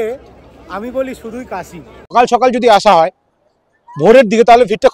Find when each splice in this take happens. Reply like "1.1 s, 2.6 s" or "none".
2.1 s